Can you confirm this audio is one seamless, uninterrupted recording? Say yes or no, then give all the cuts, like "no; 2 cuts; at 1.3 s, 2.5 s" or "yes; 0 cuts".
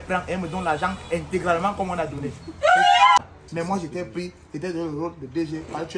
no; 1 cut; at 3.2 s